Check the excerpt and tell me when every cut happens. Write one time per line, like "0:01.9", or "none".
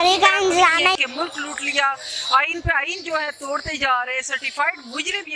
0:01.0